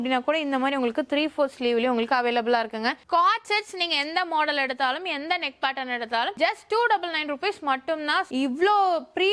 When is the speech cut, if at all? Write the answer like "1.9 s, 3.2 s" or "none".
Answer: 3.0 s, 8.3 s